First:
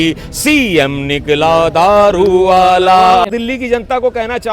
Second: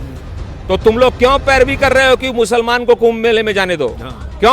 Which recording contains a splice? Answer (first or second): first